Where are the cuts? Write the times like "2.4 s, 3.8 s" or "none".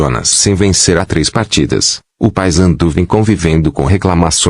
none